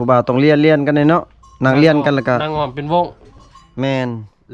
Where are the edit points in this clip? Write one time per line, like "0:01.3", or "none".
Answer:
none